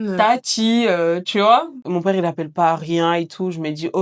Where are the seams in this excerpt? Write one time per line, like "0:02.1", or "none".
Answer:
0:01.8